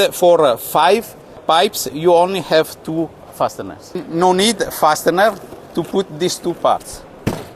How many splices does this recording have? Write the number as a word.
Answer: two